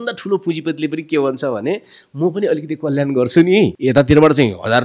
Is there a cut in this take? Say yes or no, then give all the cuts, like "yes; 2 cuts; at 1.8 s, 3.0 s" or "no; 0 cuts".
yes; 1 cut; at 3.8 s